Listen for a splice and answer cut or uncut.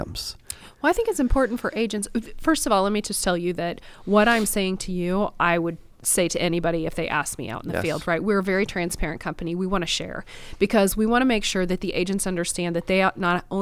uncut